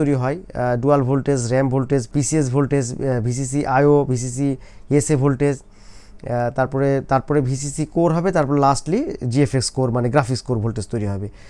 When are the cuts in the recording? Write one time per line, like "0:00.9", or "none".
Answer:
none